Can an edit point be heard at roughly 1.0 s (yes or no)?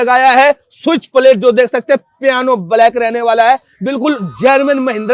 no